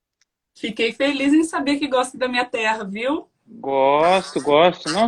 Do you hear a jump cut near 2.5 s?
yes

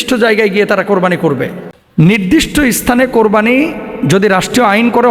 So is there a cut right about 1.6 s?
yes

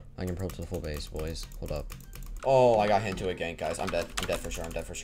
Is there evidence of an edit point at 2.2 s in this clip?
yes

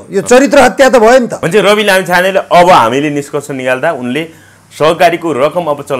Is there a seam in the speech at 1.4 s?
yes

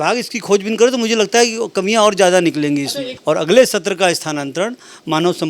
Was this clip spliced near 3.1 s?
yes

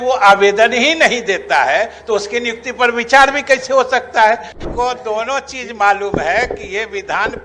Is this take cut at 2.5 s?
no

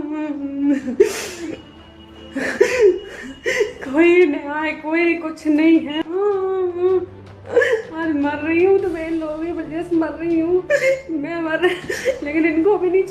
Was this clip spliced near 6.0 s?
yes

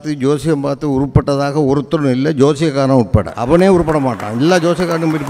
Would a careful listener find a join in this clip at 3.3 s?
yes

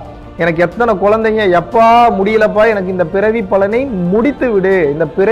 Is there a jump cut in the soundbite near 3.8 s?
no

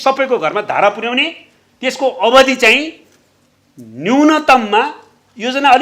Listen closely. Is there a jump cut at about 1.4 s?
no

